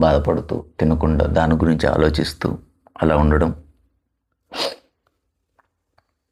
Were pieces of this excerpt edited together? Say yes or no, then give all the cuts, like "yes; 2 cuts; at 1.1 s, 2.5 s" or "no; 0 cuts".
no; 0 cuts